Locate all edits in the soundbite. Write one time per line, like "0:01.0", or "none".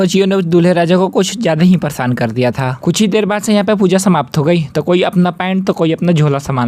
none